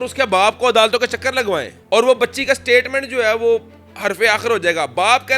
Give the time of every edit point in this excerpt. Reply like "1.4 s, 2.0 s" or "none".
none